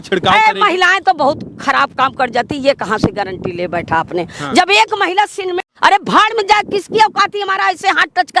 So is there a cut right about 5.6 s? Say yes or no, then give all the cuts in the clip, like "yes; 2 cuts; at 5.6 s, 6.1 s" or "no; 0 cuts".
yes; 1 cut; at 5.6 s